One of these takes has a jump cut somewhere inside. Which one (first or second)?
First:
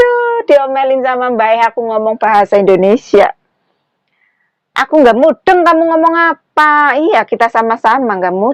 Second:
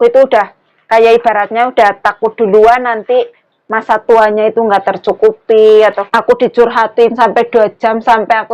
second